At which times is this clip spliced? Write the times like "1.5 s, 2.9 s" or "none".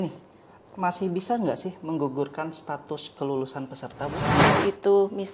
4.4 s